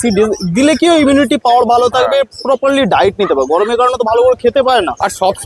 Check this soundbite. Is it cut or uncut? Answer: uncut